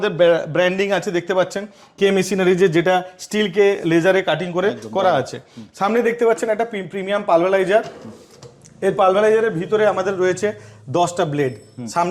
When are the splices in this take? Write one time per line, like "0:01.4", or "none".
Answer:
none